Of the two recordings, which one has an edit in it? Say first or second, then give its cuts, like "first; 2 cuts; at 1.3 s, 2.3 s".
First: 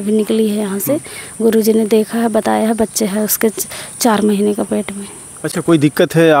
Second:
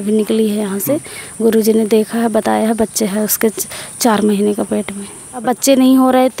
second; 1 cut; at 5.4 s